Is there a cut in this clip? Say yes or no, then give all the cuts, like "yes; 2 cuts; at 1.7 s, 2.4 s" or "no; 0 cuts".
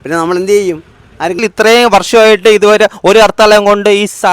yes; 1 cut; at 1.4 s